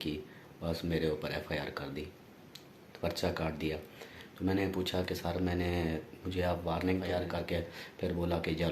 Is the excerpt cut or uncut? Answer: cut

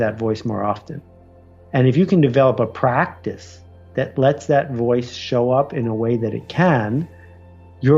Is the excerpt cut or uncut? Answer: uncut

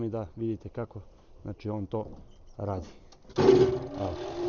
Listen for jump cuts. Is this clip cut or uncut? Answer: uncut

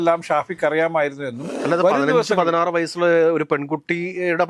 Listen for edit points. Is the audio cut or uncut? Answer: cut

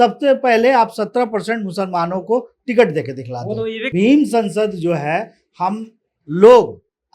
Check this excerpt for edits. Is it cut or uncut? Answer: cut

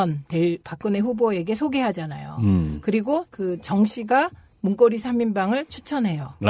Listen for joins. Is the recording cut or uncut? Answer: uncut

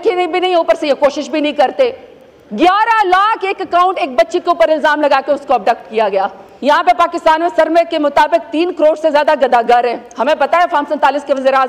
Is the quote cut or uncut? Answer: cut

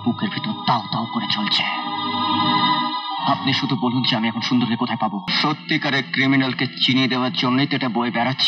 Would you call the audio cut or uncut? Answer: cut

